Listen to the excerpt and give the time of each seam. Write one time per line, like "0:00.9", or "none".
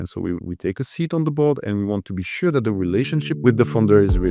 0:03.3